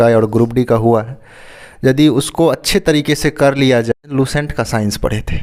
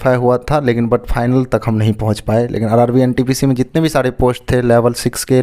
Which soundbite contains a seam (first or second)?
first